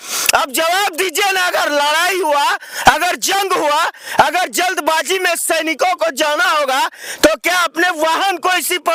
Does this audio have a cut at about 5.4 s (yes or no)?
no